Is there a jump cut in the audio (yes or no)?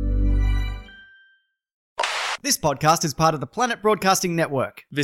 yes